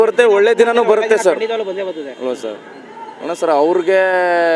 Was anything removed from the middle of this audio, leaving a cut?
no; 0 cuts

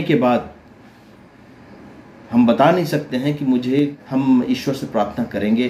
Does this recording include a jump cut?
yes; 1 cut; at 4.0 s

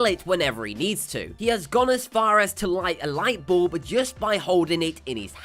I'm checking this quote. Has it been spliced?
yes; 1 cut; at 1.2 s

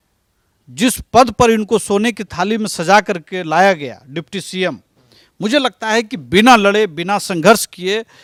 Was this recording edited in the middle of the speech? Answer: no; 0 cuts

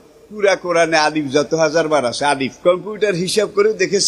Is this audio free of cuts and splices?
no; 1 cut; at 2.5 s

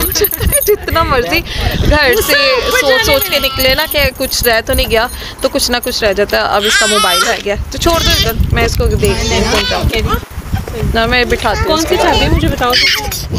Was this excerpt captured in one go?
yes; 0 cuts

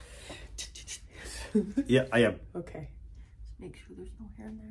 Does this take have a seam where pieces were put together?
no; 0 cuts

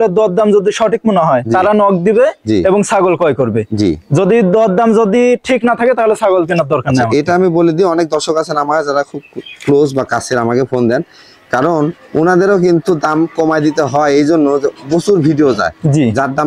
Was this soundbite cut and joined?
no; 0 cuts

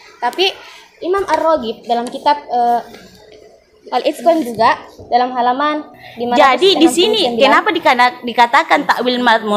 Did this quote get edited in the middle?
yes; 1 cut; at 6.4 s

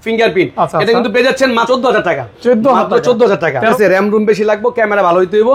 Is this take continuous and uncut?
no; 2 cuts; at 1.7 s, 3.7 s

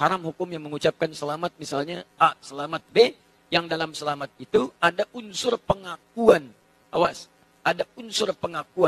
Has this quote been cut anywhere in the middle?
no; 0 cuts

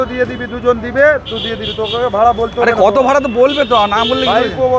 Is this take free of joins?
yes; 0 cuts

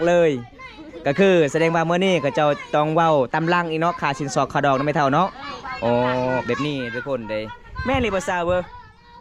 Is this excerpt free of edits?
yes; 0 cuts

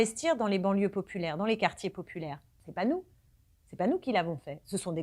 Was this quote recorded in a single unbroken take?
no; 1 cut; at 2.6 s

